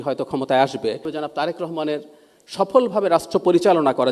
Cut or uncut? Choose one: cut